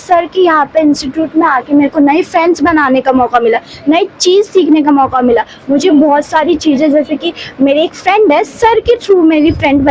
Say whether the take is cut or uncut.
uncut